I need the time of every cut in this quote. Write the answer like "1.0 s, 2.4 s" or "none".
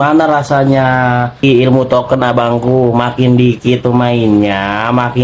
1.4 s